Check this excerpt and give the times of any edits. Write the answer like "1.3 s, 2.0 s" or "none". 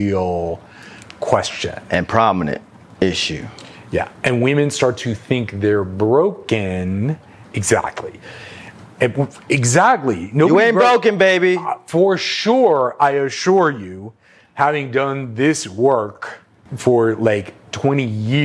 none